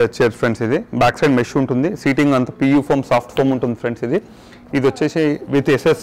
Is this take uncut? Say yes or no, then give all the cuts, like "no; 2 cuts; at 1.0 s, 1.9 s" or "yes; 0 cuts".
yes; 0 cuts